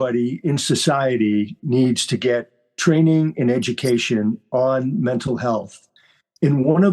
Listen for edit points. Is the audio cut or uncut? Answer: uncut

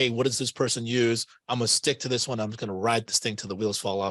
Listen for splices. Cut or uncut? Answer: uncut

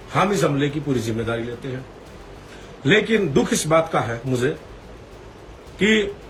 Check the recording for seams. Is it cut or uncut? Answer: uncut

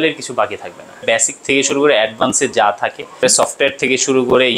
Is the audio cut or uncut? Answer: cut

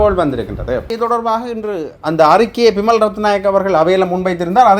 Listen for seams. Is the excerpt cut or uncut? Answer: cut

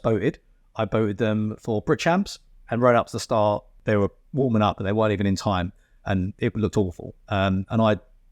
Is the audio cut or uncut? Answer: cut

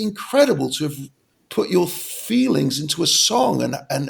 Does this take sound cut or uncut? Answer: uncut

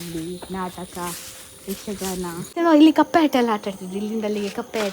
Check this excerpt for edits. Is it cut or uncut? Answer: cut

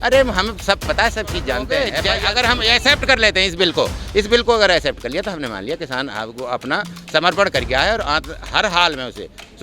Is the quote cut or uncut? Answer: cut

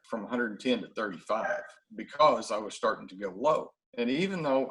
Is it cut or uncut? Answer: uncut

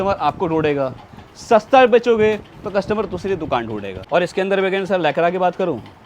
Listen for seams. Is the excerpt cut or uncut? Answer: cut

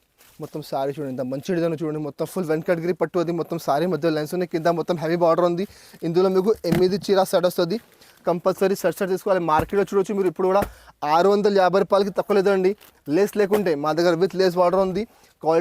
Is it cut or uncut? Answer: uncut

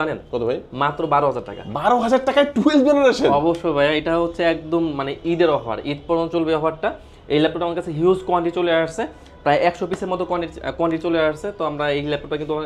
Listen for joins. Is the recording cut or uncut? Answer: uncut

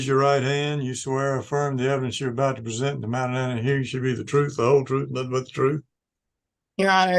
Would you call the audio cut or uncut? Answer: uncut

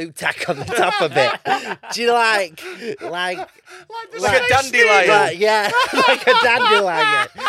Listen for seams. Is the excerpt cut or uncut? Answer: uncut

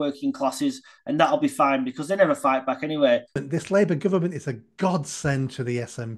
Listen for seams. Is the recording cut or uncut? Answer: cut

